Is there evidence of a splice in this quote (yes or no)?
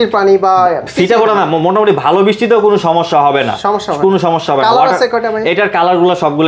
no